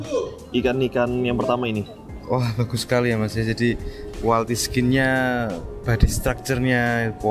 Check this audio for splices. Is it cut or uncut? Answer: uncut